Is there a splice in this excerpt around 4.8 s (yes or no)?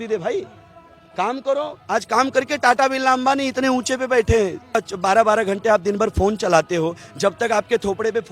yes